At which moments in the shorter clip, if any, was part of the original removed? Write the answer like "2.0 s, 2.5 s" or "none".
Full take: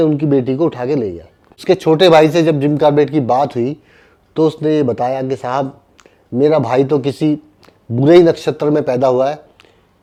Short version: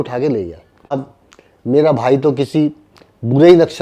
0.9 s